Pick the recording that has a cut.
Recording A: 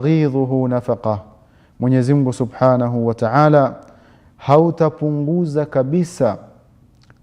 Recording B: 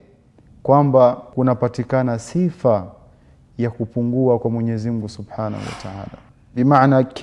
B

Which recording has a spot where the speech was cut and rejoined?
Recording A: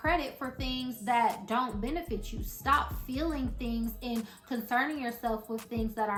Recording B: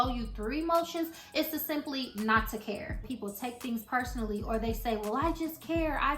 B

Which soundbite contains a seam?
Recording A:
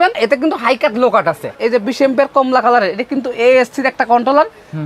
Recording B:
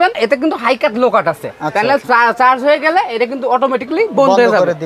A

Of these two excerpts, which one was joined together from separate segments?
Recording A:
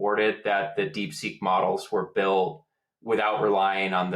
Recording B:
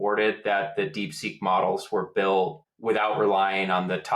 B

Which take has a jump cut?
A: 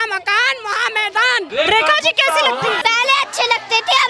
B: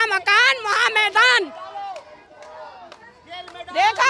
A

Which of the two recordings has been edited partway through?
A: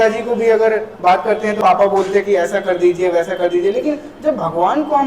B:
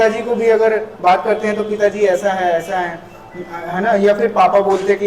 A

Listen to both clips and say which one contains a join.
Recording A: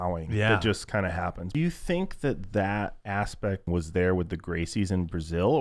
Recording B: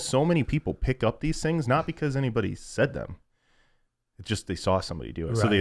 A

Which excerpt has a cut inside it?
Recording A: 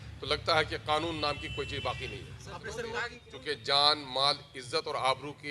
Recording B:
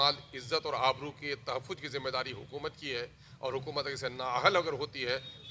A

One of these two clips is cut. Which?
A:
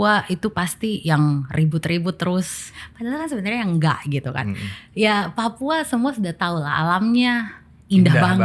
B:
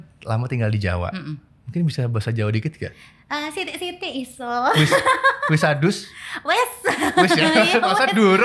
A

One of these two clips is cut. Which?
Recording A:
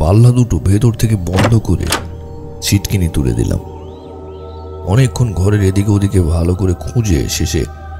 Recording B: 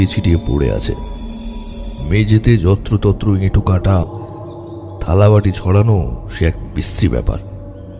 B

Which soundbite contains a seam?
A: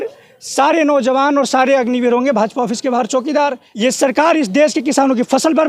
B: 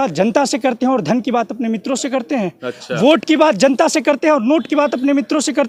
A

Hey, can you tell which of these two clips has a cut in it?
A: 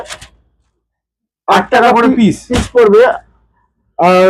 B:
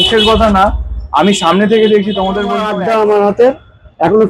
B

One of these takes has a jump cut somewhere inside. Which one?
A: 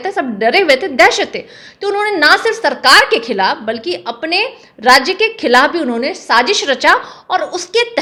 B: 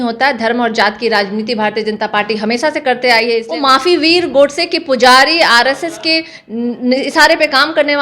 B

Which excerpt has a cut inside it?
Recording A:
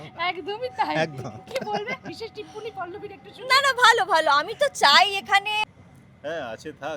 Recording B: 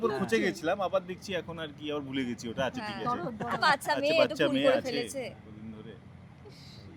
A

